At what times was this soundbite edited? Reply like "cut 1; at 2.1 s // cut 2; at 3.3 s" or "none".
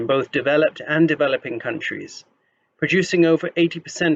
none